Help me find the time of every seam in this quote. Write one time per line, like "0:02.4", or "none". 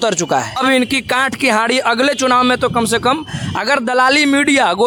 none